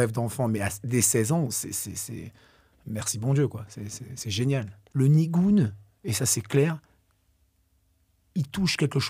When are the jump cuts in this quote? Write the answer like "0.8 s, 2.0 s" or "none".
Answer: 4.8 s